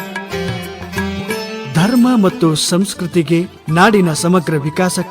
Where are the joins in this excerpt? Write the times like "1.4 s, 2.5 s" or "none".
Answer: 3.6 s